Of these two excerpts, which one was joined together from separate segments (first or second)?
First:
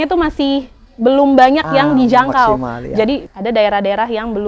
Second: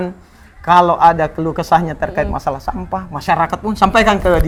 first